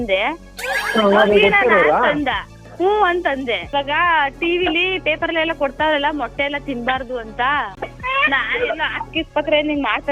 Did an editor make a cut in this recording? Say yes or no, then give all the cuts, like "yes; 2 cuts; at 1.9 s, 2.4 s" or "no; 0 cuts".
yes; 2 cuts; at 3.7 s, 7.8 s